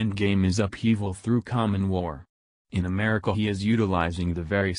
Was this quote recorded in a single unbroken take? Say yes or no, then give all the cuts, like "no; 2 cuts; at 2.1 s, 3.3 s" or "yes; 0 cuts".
no; 1 cut; at 0.9 s